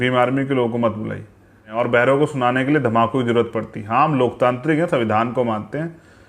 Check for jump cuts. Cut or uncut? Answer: cut